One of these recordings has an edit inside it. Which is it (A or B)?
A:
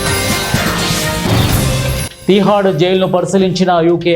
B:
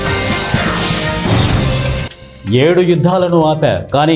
A